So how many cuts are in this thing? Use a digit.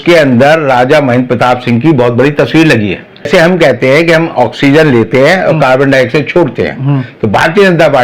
1